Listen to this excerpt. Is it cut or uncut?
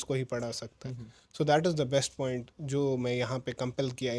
uncut